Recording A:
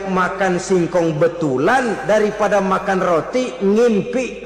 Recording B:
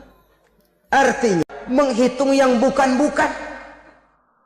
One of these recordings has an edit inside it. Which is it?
B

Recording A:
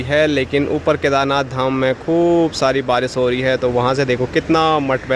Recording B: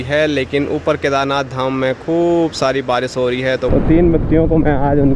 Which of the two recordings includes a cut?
B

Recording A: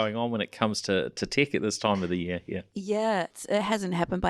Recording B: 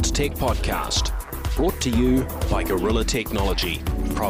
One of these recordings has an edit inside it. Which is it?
A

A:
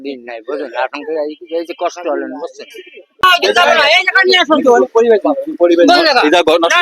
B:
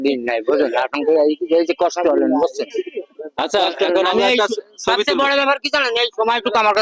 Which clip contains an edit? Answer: A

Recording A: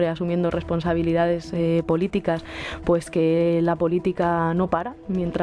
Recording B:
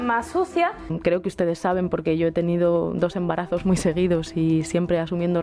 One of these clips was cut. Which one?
B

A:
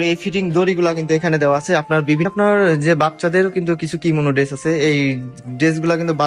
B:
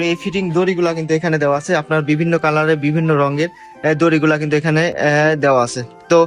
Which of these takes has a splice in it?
A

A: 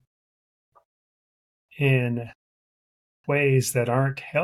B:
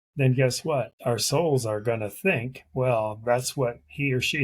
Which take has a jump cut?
B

